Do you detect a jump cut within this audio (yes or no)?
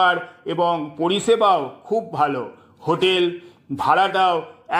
no